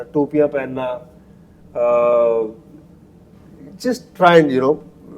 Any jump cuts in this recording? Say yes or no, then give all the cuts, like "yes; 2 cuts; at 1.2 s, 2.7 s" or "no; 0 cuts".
no; 0 cuts